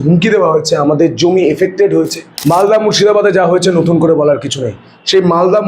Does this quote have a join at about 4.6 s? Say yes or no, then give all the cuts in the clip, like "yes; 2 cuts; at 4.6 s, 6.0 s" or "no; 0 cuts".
no; 1 cut; at 2.3 s